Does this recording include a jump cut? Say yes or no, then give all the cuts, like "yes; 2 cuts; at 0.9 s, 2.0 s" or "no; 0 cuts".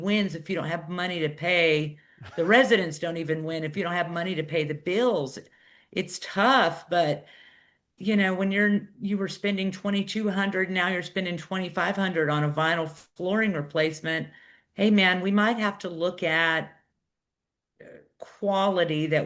no; 0 cuts